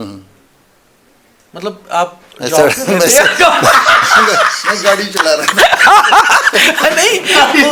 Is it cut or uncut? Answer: uncut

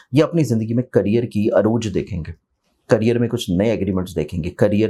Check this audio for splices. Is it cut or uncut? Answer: uncut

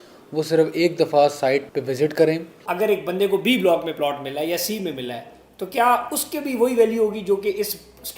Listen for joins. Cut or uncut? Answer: cut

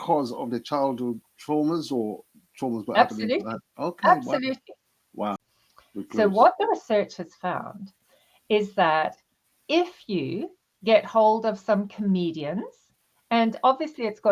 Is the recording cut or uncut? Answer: cut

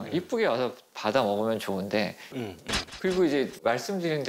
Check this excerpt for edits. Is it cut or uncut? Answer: uncut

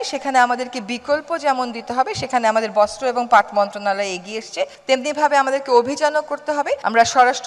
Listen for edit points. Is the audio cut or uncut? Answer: uncut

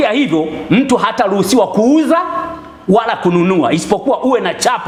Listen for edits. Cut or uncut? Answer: uncut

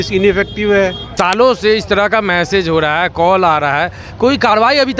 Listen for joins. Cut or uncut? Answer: cut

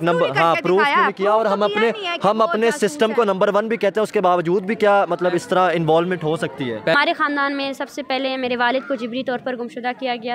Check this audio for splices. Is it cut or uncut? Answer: cut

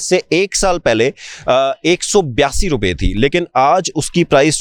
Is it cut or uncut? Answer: uncut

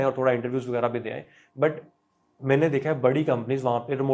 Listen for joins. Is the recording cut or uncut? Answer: uncut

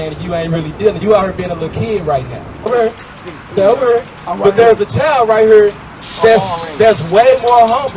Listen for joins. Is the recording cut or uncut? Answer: cut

